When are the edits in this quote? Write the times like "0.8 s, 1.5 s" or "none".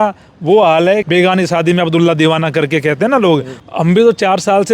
1.0 s, 3.5 s